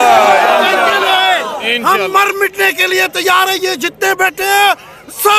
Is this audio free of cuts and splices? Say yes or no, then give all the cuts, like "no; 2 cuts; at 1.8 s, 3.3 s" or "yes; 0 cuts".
yes; 0 cuts